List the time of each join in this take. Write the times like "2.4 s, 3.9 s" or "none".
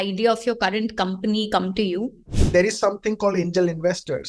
2.3 s

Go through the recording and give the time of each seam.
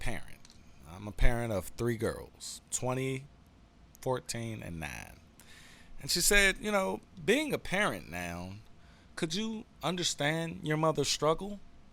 none

